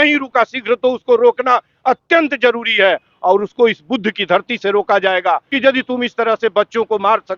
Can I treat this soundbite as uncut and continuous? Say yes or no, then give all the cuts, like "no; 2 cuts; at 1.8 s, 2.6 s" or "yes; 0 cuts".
no; 1 cut; at 5.5 s